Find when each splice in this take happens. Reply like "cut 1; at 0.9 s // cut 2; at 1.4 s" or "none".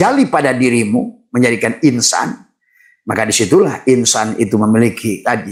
none